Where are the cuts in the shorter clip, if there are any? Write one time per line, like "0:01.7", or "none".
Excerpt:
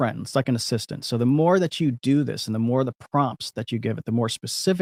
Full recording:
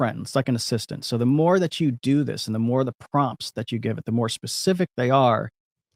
none